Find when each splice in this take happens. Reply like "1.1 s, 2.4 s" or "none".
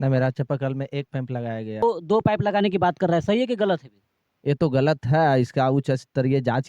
1.8 s